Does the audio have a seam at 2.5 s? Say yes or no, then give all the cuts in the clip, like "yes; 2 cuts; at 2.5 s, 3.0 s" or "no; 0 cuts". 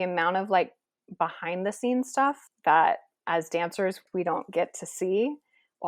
yes; 2 cuts; at 2.5 s, 4.0 s